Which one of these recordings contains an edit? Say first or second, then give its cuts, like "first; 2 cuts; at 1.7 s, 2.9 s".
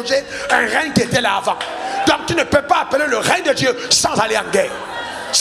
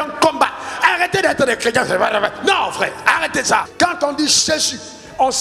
second; 1 cut; at 3.7 s